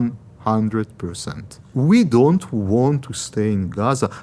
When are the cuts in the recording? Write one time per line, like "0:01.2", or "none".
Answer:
0:01.7